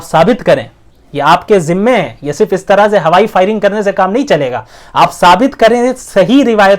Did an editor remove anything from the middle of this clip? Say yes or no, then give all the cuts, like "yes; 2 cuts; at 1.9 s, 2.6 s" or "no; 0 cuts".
no; 0 cuts